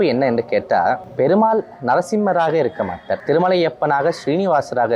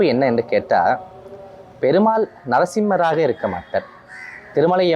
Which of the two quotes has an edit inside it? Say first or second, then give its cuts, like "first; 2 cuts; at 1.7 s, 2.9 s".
first; 2 cuts; at 1.1 s, 3.1 s